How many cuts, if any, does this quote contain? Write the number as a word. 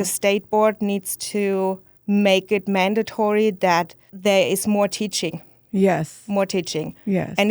two